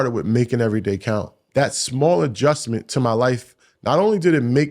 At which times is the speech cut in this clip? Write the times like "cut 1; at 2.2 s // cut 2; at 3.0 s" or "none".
cut 1; at 1.4 s